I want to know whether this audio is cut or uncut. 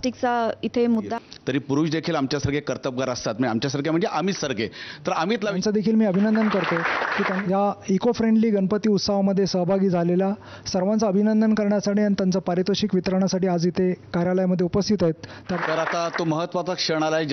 cut